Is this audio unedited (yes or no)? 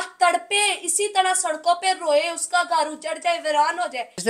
yes